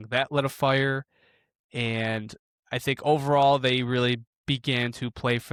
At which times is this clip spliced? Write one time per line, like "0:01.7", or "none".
none